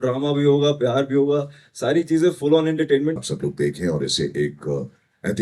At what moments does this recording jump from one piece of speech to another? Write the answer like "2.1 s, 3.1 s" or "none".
3.2 s